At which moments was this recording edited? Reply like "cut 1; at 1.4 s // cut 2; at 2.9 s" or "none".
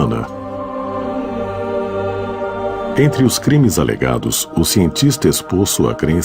cut 1; at 3.9 s